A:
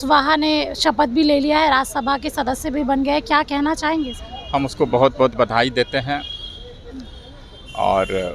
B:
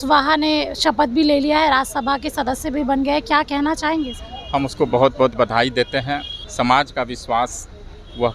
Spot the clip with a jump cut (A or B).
B